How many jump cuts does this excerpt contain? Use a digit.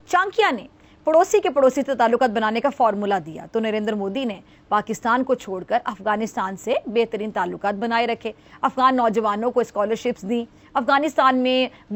0